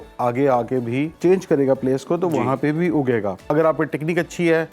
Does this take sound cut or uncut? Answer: cut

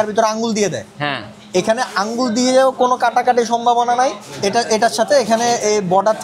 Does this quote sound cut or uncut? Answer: uncut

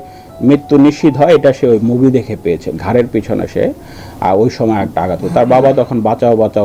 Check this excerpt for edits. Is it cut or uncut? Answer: uncut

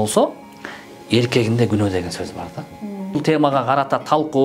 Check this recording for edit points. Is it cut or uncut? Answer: cut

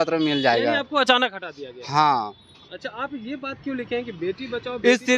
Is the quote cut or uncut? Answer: cut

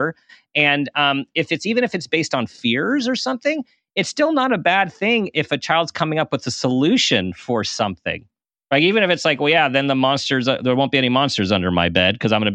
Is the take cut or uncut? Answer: uncut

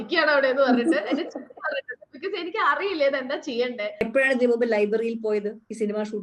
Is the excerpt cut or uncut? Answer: cut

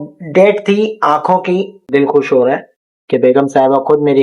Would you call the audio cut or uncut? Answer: cut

